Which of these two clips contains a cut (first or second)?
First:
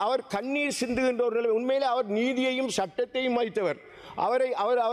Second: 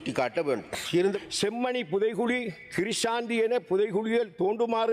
second